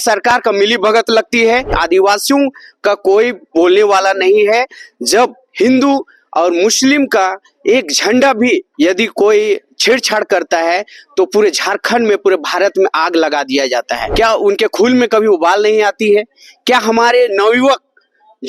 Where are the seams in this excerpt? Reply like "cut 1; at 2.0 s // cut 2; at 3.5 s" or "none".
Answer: cut 1; at 1.8 s // cut 2; at 14.0 s